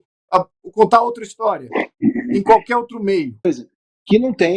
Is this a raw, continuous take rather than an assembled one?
no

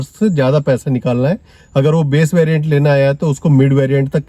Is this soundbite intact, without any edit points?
yes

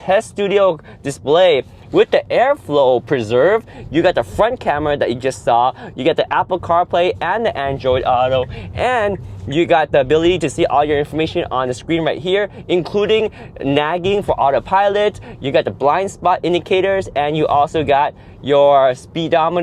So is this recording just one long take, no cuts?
yes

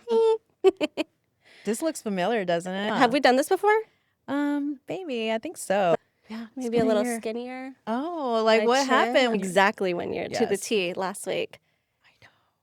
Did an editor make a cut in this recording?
yes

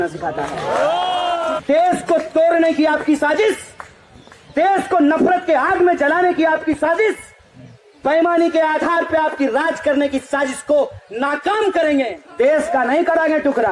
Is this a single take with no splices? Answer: no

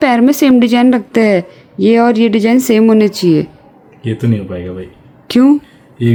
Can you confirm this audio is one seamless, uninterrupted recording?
yes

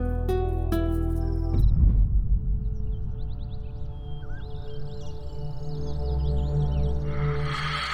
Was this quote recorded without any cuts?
yes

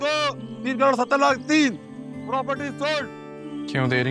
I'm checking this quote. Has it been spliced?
no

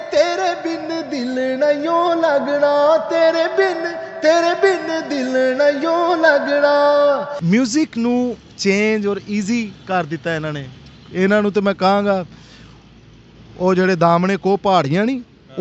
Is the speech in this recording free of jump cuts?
no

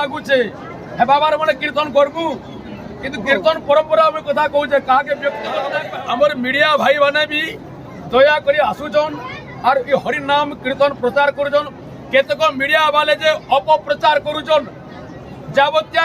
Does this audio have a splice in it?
yes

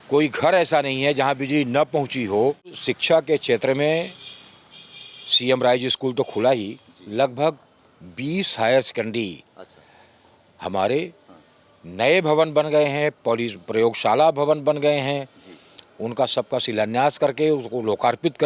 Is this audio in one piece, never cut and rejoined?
no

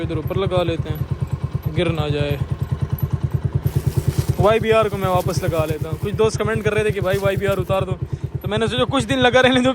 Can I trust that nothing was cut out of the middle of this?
yes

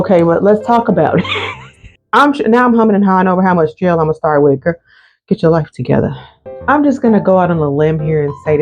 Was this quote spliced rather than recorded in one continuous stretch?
yes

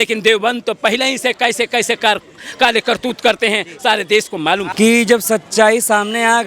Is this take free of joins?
no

